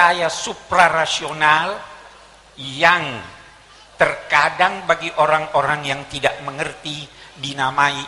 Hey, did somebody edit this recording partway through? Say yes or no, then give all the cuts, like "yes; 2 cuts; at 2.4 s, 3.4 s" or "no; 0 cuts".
no; 0 cuts